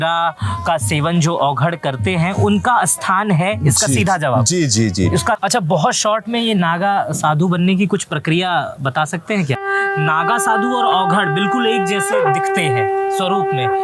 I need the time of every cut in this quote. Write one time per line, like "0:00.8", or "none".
0:05.4
0:09.6